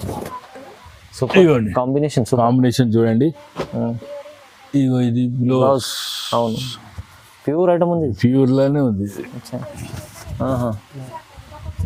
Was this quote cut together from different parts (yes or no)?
no